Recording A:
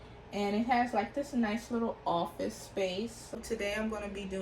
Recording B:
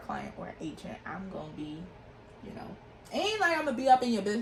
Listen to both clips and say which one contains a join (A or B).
A